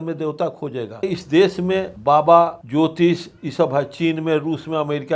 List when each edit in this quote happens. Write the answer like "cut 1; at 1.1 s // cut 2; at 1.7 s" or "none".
cut 1; at 1.0 s // cut 2; at 1.9 s // cut 3; at 2.6 s